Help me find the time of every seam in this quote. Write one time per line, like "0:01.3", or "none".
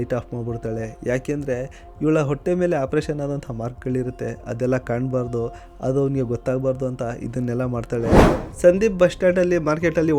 0:08.3